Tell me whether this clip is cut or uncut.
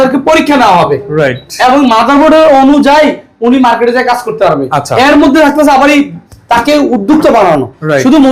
uncut